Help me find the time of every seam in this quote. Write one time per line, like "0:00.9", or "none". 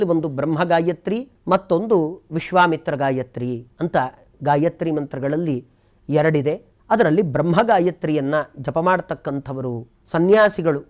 0:01.3
0:06.7